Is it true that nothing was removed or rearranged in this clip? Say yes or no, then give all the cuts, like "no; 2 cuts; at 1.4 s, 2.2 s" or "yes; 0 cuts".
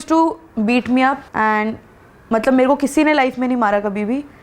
no; 1 cut; at 1.3 s